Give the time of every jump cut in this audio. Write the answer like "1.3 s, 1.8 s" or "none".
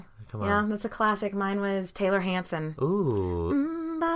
2.7 s